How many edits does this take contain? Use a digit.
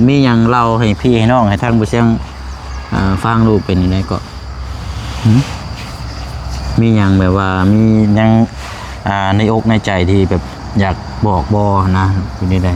0